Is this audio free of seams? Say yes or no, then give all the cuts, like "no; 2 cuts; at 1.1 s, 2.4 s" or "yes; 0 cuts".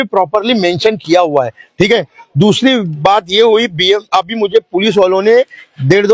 yes; 0 cuts